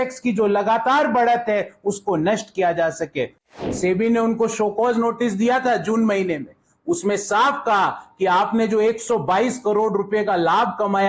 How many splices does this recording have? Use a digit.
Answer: 1